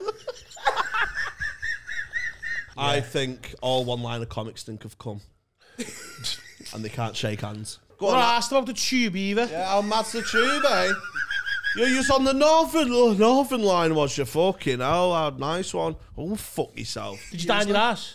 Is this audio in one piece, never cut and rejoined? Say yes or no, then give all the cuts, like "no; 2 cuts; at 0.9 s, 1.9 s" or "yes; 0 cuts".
no; 3 cuts; at 2.7 s, 7.9 s, 17.3 s